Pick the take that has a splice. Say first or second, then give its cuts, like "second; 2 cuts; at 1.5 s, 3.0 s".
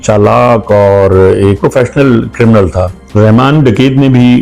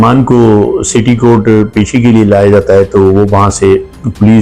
first; 2 cuts; at 1.6 s, 3.0 s